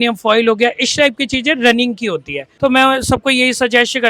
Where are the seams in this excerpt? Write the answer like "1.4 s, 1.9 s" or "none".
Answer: 2.4 s